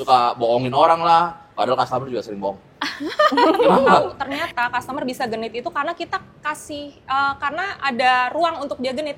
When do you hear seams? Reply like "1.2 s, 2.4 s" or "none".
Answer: 4.1 s